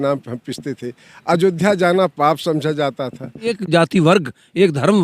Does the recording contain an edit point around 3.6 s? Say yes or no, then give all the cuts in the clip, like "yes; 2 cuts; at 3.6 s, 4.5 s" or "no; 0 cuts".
yes; 1 cut; at 3.6 s